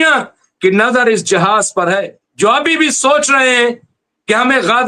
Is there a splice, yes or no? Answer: yes